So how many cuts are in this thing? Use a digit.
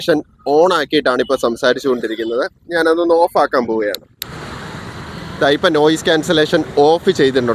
0